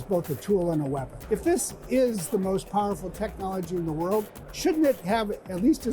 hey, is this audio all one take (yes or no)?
no